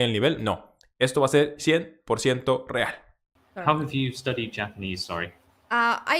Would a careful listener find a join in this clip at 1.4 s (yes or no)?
no